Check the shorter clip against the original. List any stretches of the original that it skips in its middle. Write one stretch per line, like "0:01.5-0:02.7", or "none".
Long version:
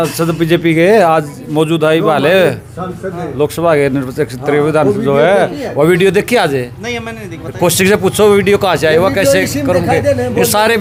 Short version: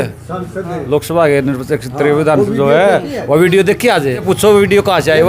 0:06.7-0:08.0